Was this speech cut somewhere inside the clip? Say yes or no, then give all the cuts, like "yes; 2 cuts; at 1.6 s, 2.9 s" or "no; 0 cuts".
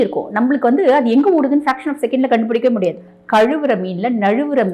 yes; 1 cut; at 3.1 s